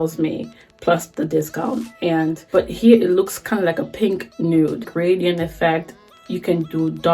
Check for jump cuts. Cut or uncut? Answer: cut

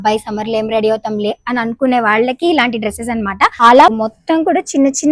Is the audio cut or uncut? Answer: cut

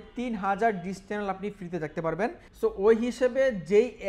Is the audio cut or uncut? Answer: cut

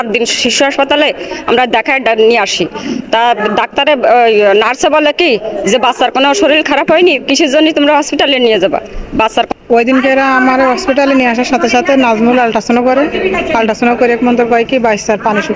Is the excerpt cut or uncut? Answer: cut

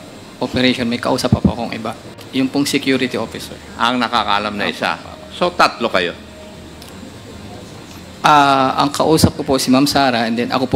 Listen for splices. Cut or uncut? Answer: uncut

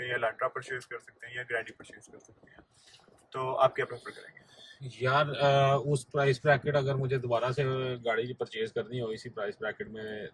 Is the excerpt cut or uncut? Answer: uncut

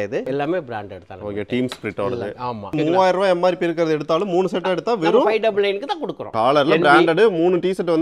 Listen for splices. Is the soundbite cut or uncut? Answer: cut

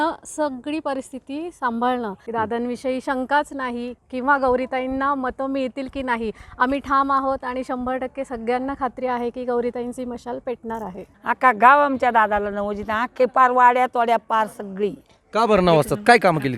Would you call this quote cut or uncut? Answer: cut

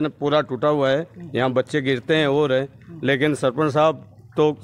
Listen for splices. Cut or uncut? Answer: uncut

